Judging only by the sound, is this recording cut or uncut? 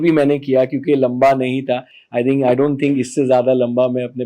uncut